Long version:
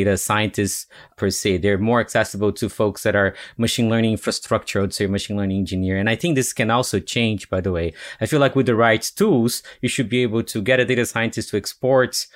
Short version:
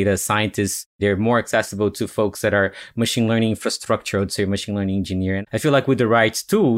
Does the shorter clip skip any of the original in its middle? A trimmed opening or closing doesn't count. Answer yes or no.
yes